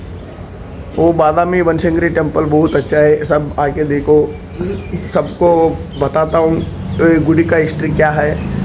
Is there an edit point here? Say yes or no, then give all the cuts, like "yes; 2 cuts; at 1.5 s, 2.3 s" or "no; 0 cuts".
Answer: no; 0 cuts